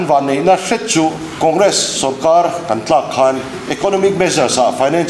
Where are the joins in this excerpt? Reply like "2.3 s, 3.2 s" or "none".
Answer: 1.3 s, 3.6 s